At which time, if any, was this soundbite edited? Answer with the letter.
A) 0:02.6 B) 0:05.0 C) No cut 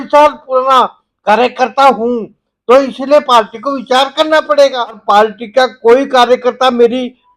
B